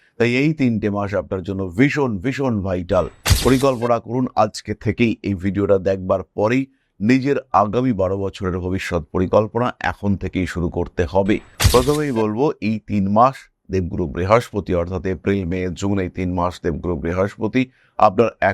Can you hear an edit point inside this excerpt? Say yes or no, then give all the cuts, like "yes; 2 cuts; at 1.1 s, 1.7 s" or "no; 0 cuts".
yes; 1 cut; at 11.5 s